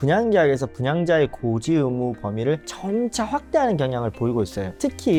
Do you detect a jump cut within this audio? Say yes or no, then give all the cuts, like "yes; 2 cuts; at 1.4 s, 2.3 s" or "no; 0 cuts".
no; 0 cuts